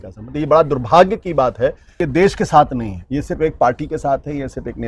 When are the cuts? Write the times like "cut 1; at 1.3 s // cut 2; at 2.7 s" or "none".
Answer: cut 1; at 2.0 s